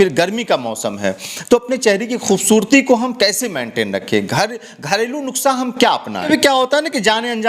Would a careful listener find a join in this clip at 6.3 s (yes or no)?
yes